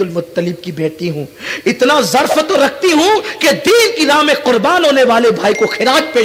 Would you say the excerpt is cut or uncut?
uncut